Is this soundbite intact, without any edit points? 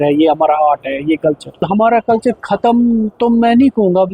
no; 1 cut; at 1.7 s

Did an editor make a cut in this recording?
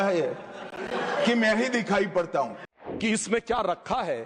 yes; 1 cut; at 2.7 s

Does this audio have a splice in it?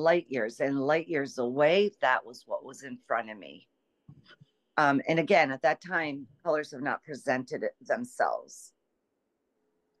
no; 0 cuts

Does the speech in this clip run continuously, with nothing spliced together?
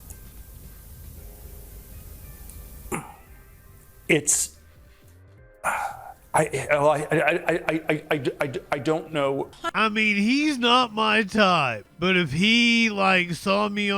no; 2 cuts; at 9.6 s, 11.8 s

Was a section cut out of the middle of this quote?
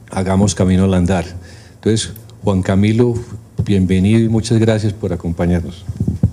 no; 0 cuts

